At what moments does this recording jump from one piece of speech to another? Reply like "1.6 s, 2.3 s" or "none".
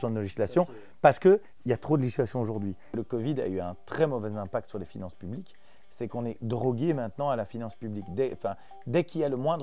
2.9 s